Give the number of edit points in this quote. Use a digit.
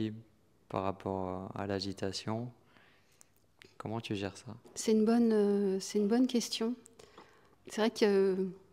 0